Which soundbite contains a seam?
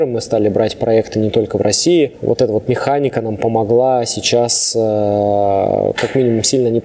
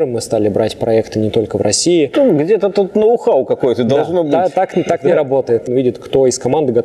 second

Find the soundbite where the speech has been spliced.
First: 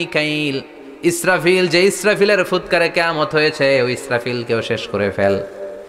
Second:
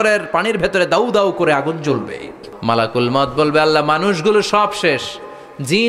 second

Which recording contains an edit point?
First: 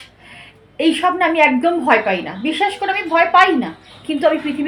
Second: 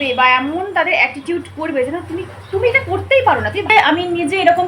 second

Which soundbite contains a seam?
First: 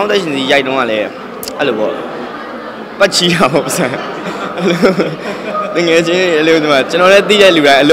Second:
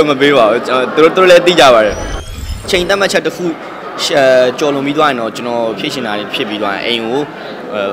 second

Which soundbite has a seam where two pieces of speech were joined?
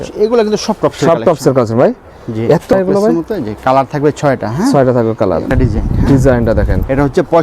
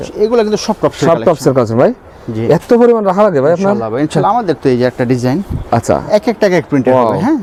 first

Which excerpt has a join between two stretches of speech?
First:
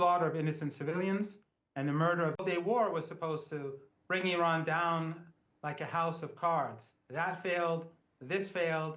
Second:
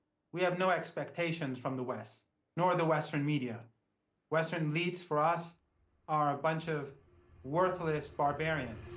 first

